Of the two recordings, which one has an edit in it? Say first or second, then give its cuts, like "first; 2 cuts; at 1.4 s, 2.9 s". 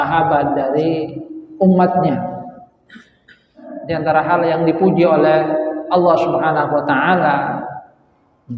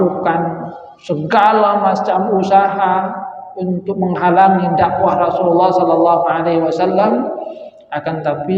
first; 1 cut; at 3.7 s